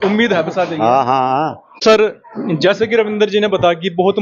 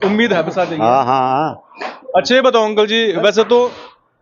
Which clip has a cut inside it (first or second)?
first